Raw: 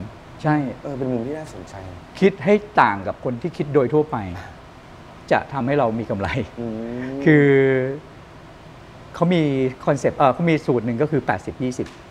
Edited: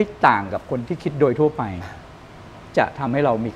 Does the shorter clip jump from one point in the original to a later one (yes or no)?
no